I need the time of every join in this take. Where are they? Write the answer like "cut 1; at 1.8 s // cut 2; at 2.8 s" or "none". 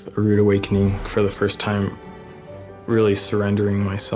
cut 1; at 1.0 s